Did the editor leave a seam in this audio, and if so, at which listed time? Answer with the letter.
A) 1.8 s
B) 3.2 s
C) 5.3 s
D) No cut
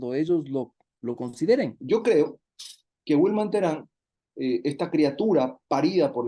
A